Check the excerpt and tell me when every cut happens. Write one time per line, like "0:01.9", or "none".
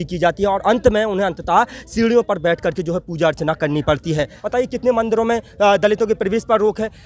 0:04.4